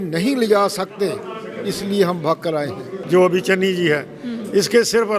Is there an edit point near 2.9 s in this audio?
yes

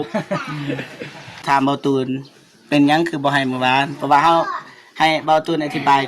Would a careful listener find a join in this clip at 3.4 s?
no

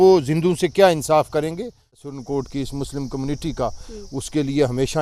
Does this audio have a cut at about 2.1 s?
yes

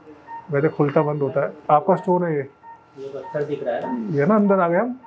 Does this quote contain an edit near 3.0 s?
no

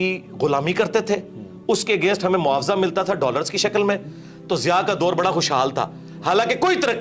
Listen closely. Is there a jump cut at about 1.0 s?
no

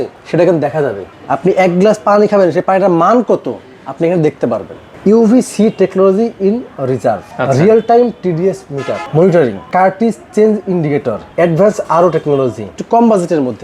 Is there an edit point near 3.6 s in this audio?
no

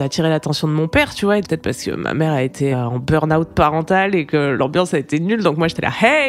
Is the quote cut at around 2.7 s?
yes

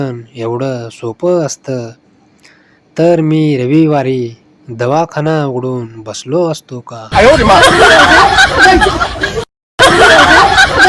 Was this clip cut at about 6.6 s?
yes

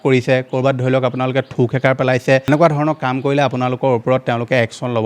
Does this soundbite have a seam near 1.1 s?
no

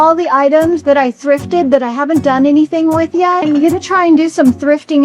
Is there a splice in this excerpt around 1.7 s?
no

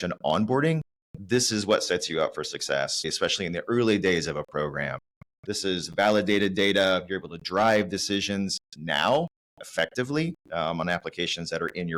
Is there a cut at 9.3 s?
no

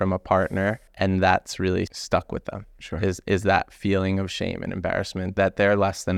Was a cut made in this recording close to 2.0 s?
yes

